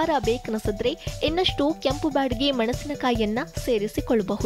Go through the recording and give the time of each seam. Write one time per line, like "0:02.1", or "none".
none